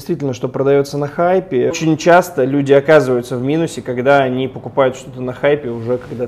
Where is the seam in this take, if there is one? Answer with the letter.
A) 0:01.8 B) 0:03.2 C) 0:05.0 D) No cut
A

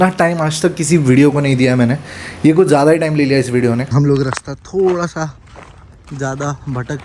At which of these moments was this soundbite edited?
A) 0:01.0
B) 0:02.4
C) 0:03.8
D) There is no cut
C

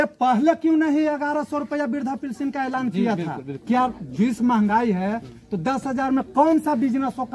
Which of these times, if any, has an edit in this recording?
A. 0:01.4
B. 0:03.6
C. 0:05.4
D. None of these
B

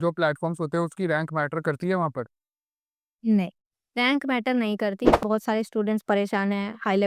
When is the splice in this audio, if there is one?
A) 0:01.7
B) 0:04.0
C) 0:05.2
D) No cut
C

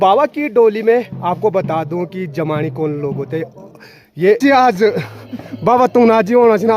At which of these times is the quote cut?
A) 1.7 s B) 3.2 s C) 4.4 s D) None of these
C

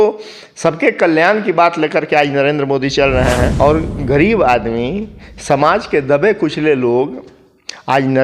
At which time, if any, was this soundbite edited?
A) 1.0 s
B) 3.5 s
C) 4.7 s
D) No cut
B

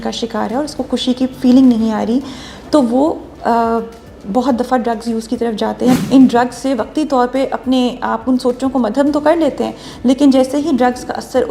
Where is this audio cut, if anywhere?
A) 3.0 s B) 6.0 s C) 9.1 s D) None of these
B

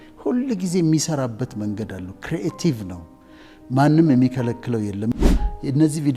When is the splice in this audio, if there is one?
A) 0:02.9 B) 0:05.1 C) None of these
B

